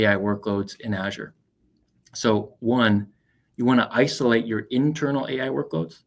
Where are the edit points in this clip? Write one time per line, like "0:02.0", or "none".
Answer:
none

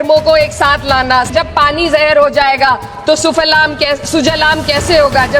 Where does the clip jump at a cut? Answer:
0:01.3

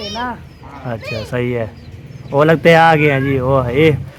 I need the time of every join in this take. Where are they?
none

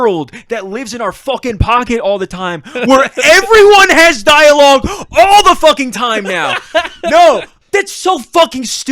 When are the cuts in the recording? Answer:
0:07.5

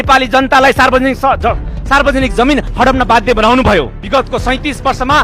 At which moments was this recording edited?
0:04.0

